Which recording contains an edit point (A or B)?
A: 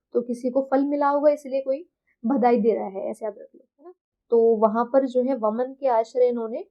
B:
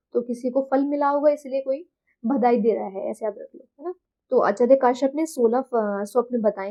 A